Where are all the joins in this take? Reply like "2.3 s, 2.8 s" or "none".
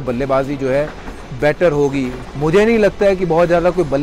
2.2 s